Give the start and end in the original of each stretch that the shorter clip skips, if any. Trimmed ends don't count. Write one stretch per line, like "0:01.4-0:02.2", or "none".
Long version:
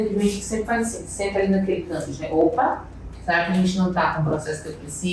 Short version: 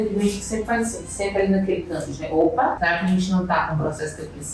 0:02.8-0:03.2